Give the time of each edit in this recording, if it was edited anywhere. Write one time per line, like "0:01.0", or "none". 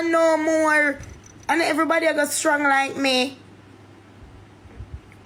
none